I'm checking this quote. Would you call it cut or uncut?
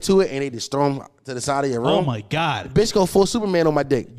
cut